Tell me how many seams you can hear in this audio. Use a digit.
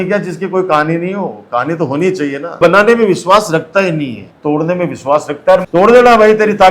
3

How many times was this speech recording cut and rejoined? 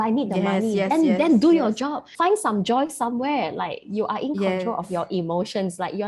1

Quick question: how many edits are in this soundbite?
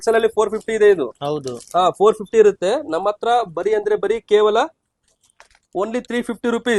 0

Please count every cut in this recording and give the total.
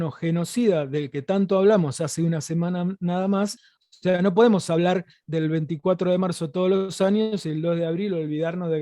1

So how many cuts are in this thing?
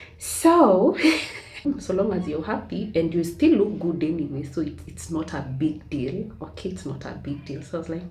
1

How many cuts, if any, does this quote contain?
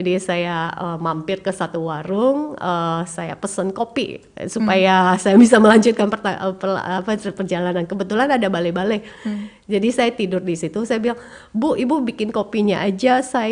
0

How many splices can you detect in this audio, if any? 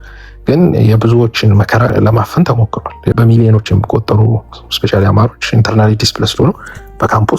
2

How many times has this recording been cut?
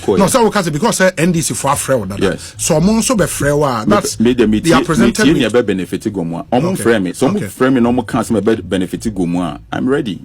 0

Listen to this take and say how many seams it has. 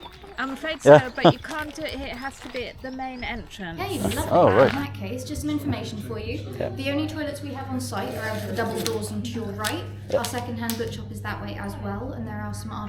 1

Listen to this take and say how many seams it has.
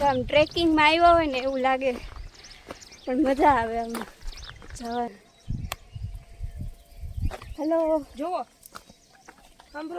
1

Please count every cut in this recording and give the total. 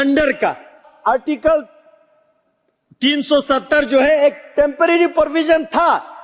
1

